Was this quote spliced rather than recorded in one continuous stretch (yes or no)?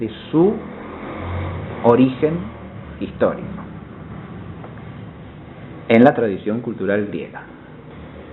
yes